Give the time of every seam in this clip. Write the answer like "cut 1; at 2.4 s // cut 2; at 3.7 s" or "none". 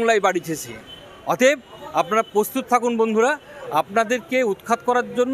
none